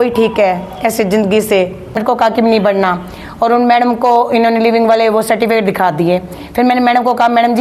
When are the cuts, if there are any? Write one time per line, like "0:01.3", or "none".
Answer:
0:02.0